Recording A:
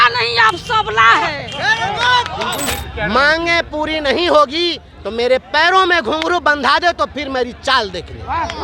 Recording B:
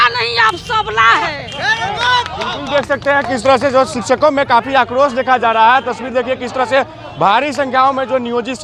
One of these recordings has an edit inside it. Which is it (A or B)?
A